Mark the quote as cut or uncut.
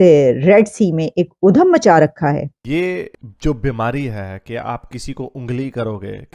cut